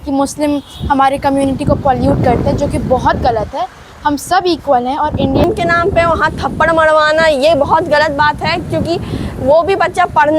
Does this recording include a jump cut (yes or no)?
yes